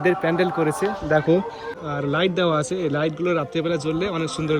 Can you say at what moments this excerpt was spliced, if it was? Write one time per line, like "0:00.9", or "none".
0:01.8